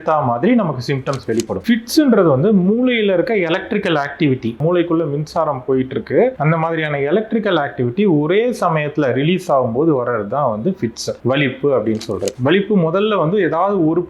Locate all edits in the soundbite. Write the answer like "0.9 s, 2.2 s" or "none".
1.6 s, 12.3 s